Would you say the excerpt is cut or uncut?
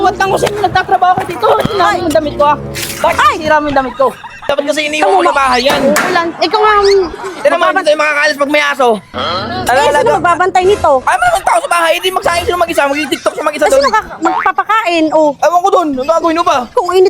cut